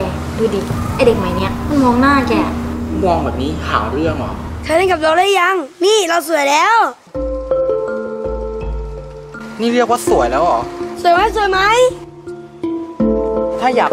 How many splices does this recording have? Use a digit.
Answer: 1